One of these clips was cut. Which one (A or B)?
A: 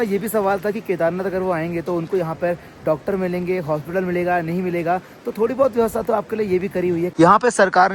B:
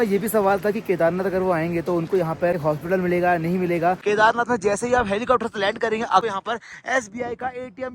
B